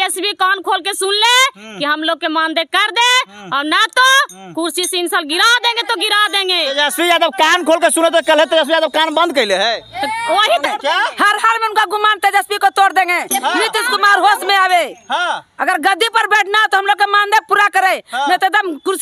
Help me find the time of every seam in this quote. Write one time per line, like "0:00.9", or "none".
0:10.6